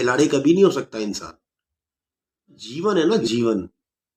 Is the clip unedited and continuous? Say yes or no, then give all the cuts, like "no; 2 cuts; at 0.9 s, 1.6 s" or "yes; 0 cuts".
no; 1 cut; at 2.7 s